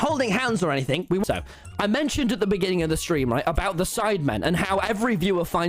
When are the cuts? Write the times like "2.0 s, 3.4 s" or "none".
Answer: 1.2 s